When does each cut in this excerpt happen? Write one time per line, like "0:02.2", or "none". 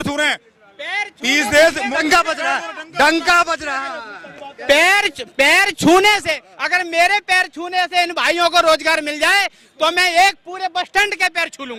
none

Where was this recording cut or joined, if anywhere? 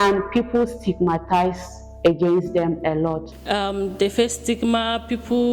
0:03.3

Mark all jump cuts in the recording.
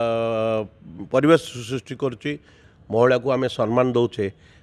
0:02.7

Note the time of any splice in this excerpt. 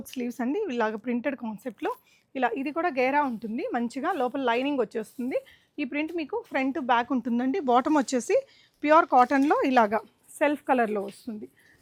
none

